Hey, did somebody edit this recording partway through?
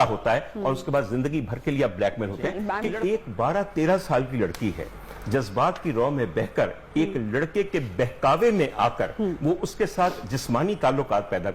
yes; 1 cut; at 2.8 s

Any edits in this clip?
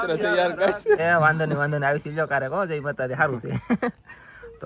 yes; 1 cut; at 1.0 s

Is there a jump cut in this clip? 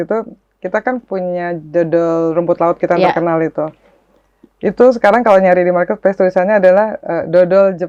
no; 0 cuts

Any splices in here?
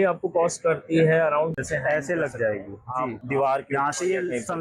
yes; 2 cuts; at 1.6 s, 3.2 s

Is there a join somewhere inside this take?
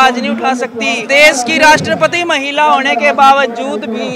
yes; 1 cut; at 1.0 s

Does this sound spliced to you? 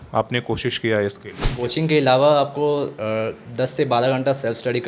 yes; 1 cut; at 1.5 s

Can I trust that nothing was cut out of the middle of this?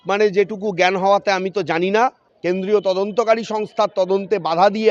no; 1 cut; at 2.2 s

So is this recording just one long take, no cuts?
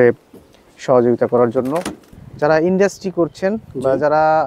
no; 1 cut; at 2.0 s

